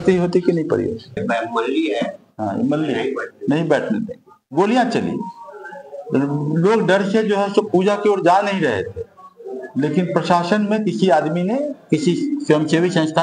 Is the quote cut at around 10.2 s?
no; 1 cut; at 1.2 s

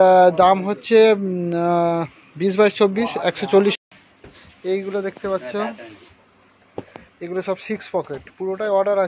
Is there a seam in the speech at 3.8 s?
yes; 1 cut; at 3.8 s

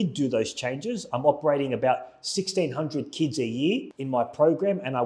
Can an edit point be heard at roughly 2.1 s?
no; 1 cut; at 3.9 s

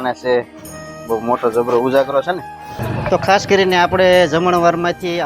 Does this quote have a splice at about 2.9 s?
yes; 1 cut; at 2.9 s

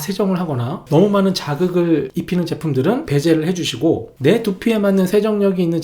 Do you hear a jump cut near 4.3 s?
no; 3 cuts; at 0.8 s, 2.1 s, 3.0 s

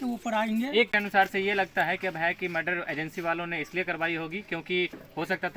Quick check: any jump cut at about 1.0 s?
yes; 1 cut; at 1.0 s

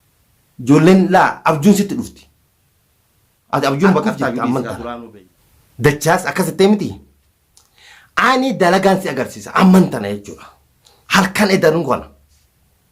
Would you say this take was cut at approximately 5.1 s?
yes; 1 cut; at 5.1 s

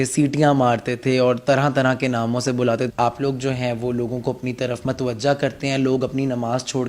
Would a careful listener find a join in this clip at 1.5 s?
no; 1 cut; at 2.9 s

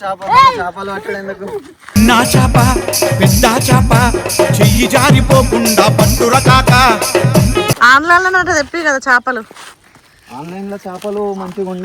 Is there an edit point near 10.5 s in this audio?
no; 2 cuts; at 1.7 s, 7.7 s

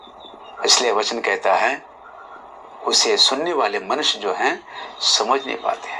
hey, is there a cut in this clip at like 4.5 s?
no; 0 cuts

